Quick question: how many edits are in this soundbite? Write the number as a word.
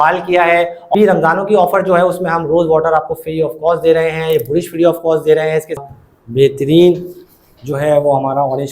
two